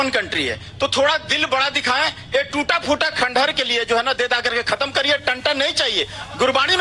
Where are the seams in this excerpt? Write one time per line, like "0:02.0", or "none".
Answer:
none